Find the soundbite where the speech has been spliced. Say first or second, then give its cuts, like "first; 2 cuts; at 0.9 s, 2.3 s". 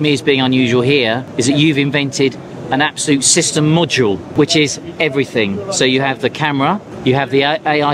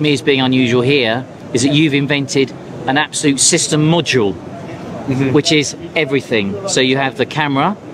first; 3 cuts; at 1.3 s, 4.3 s, 6.9 s